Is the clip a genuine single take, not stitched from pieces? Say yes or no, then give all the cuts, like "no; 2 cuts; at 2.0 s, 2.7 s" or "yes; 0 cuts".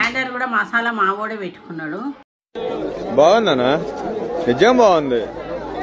yes; 0 cuts